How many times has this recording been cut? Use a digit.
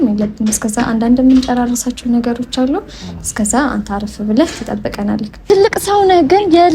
1